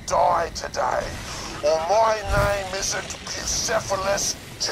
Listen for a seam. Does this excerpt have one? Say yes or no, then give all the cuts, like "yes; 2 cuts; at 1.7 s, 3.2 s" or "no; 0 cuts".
no; 0 cuts